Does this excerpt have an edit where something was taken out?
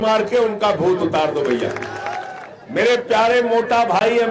yes; 1 cut; at 2.2 s

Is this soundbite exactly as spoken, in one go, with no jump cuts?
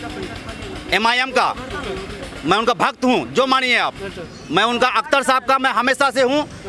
yes; 0 cuts

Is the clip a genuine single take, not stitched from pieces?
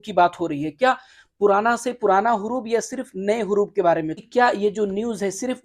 no; 1 cut; at 4.1 s

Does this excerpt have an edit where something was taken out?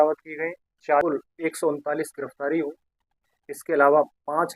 yes; 1 cut; at 1.0 s

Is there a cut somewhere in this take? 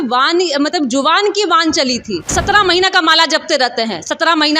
yes; 1 cut; at 2.3 s

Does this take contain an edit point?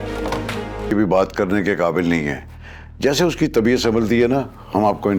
yes; 1 cut; at 0.9 s

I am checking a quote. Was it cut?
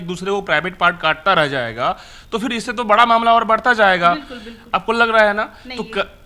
no; 0 cuts

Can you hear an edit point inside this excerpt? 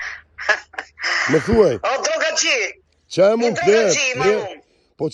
no; 0 cuts

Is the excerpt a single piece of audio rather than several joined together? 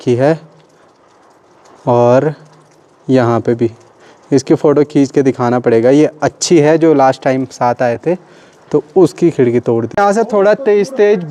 yes; 0 cuts

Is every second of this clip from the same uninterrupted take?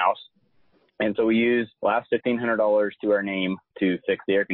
no; 1 cut; at 1.7 s

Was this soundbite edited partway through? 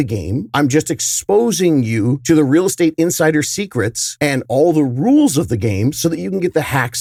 no; 0 cuts

